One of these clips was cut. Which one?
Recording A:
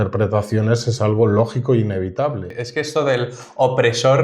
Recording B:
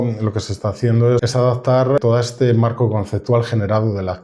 A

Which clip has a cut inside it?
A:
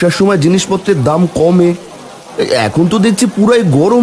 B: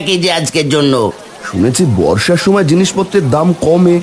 B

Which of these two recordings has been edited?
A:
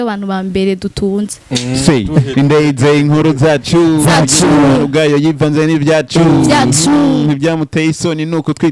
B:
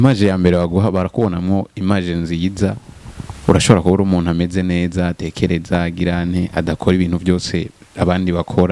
A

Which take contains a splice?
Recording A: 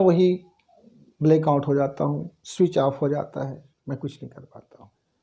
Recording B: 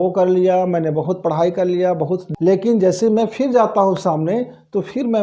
B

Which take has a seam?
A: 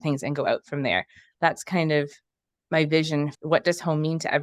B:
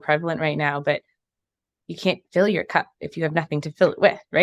A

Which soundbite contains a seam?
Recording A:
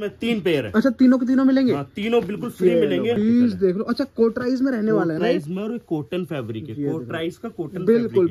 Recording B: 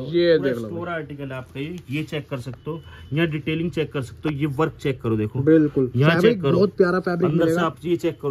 A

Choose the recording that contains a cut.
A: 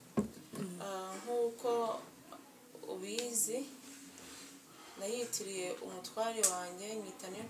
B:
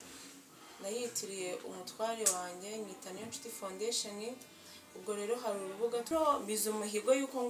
B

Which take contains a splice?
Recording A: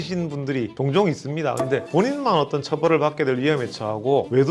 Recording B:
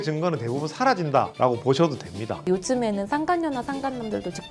B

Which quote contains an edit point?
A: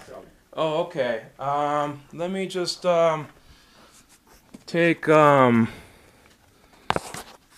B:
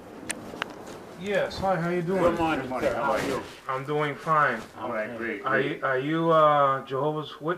A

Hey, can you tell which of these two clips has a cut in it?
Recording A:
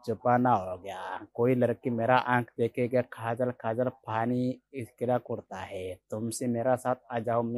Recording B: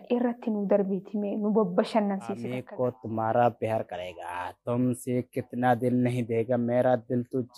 B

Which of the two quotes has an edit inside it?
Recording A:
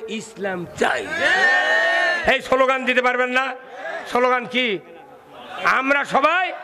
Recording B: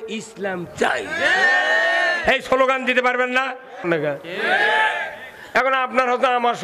B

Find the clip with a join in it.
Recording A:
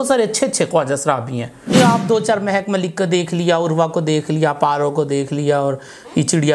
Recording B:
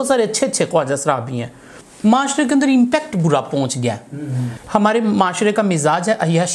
A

